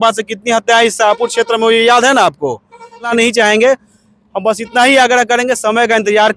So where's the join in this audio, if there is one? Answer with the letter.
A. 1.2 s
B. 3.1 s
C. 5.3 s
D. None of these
B